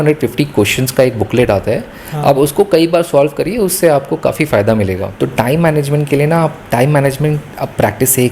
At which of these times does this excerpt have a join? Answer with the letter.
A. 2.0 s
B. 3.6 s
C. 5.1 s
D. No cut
C